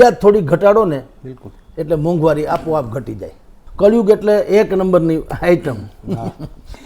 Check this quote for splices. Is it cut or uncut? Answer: cut